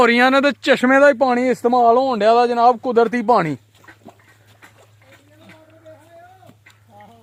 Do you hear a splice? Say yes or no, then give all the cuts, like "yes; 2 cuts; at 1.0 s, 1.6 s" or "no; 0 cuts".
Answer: no; 0 cuts